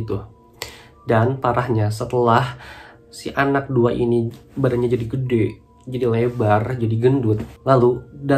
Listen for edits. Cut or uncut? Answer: uncut